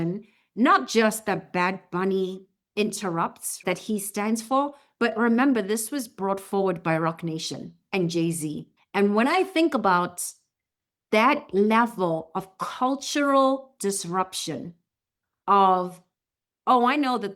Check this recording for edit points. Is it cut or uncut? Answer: cut